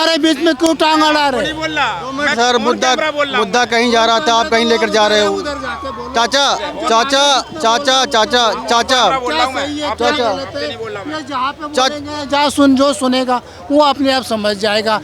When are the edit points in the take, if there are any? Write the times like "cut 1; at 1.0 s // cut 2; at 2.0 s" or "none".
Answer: none